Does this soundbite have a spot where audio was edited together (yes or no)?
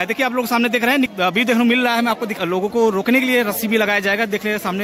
yes